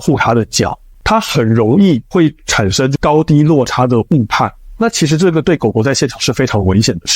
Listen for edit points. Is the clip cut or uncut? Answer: cut